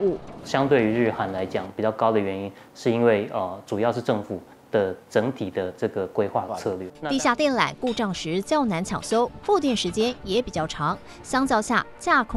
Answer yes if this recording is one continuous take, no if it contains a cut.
no